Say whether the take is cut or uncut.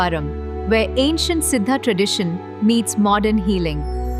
uncut